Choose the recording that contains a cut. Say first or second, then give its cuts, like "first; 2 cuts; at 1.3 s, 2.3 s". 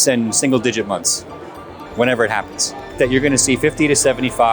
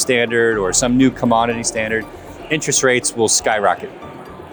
first; 1 cut; at 2.9 s